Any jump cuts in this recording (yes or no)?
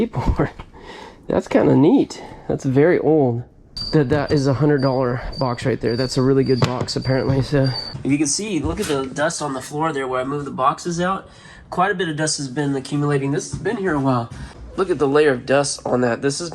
yes